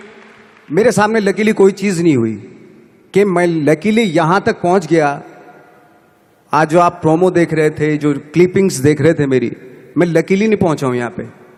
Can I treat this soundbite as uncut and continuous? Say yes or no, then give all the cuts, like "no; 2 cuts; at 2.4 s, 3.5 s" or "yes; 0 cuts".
yes; 0 cuts